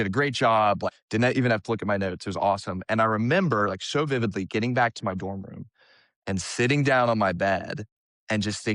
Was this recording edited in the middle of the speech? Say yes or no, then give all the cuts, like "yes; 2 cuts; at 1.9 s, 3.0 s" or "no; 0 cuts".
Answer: yes; 1 cut; at 1.0 s